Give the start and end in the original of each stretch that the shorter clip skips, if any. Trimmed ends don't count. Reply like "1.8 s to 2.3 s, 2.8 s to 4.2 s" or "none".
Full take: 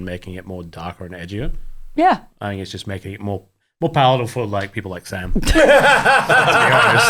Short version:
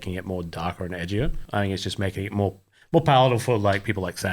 1.7 s to 2.4 s